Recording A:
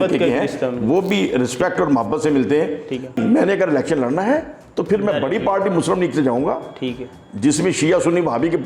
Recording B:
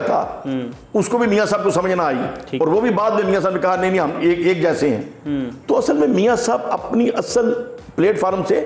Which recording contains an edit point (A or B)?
A